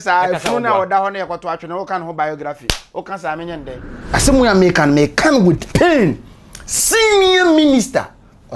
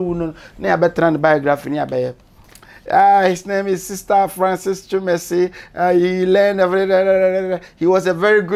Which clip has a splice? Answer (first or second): first